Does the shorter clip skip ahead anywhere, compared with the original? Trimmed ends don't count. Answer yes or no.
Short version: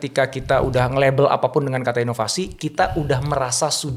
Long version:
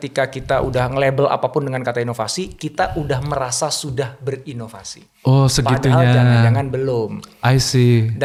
no